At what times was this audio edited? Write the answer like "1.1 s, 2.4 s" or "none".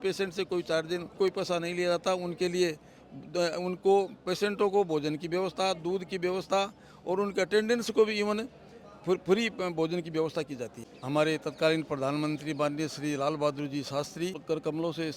1.1 s, 10.8 s, 14.4 s